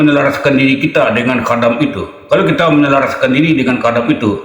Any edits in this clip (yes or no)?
no